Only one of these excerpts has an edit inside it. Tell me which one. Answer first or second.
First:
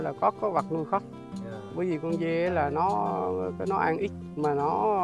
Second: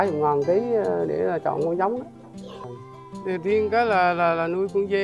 second